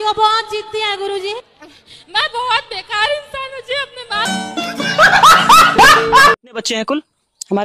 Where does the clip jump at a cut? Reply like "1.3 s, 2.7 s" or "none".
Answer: 6.4 s

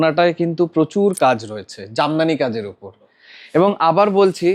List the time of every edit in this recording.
none

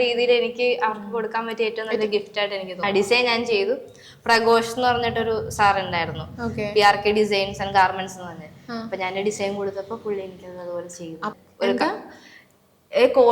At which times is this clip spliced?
2.8 s, 11.3 s

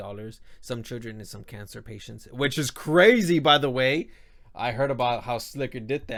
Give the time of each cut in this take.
none

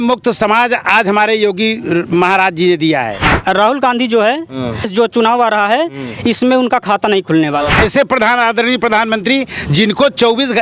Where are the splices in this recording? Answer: 3.2 s, 4.9 s, 7.7 s

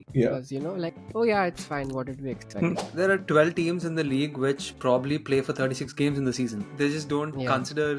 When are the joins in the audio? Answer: 2.9 s

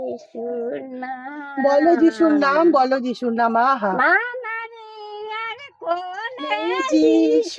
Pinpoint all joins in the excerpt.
none

